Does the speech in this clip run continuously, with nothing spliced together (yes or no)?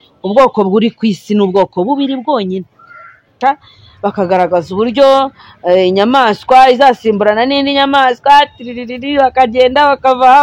no